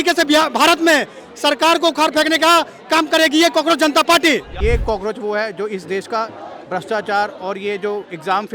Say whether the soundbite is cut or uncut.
cut